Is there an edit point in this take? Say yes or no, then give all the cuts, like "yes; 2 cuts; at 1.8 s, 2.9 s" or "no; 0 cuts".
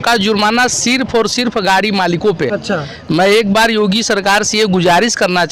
no; 0 cuts